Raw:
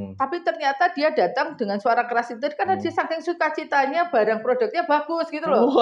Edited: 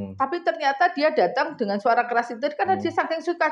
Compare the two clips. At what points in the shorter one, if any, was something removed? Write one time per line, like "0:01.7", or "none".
none